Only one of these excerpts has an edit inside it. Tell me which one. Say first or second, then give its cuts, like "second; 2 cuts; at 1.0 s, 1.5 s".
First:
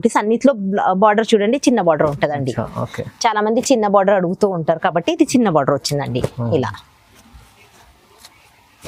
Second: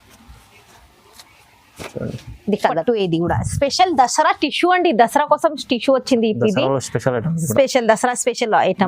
second; 1 cut; at 2.8 s